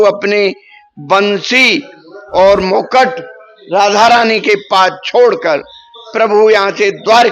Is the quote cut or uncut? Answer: uncut